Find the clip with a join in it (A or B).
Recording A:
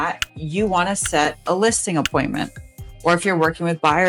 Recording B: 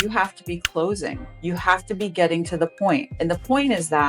B